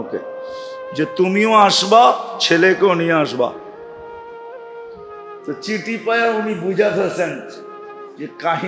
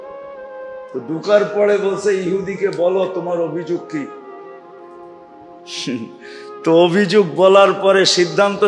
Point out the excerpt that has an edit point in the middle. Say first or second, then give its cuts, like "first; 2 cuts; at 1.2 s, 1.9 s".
second; 1 cut; at 0.9 s